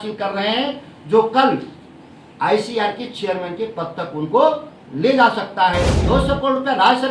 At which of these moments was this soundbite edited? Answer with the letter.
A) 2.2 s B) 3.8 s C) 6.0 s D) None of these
C